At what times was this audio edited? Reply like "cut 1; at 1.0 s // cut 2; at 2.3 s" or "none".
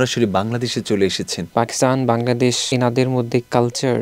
cut 1; at 1.5 s // cut 2; at 2.7 s

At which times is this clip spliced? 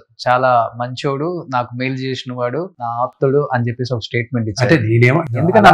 cut 1; at 3.0 s

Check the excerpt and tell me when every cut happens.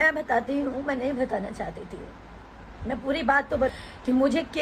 cut 1; at 3.7 s

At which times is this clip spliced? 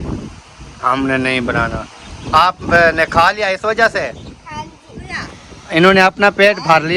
cut 1; at 5.1 s

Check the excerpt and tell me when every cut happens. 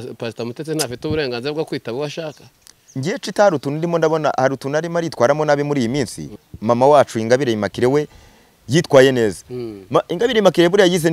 cut 1; at 6.4 s

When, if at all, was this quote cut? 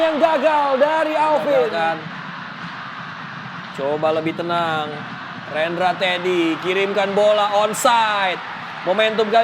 cut 1; at 1.7 s

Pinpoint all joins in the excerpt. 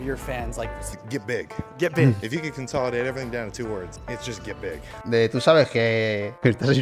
cut 1; at 0.9 s // cut 2; at 5.0 s

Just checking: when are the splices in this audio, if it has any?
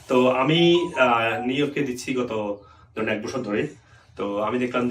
none

